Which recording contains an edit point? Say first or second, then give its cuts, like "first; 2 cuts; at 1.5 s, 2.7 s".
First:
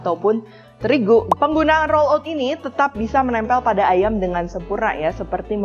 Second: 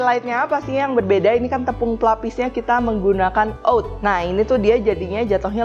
first; 1 cut; at 1.3 s